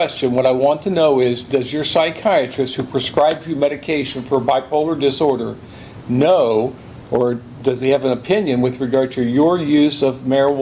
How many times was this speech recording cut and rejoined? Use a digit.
0